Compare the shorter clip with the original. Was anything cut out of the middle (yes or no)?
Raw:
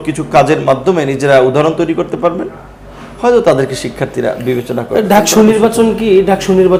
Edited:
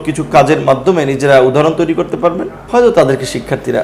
yes